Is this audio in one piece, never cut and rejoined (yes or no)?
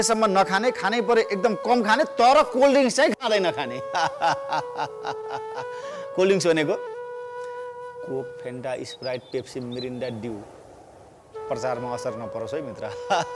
yes